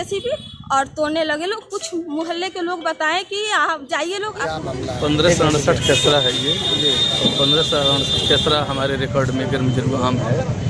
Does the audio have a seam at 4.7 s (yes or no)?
yes